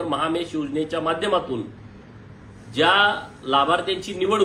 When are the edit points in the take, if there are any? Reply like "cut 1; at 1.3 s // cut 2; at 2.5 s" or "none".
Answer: none